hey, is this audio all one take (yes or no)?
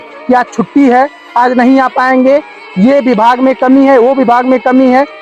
yes